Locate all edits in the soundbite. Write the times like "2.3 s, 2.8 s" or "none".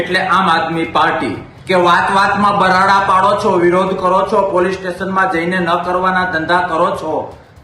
1.5 s